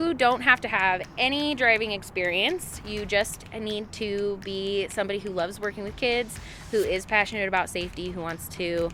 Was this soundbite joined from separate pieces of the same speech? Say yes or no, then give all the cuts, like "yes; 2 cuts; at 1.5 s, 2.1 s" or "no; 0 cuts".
no; 0 cuts